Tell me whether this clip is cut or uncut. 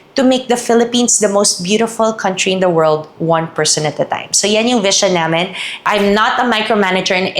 cut